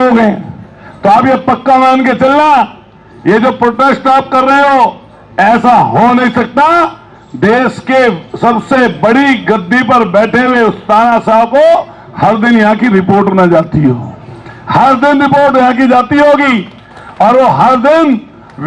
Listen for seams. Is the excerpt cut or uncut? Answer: uncut